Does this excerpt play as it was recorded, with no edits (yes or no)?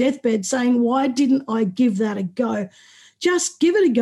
yes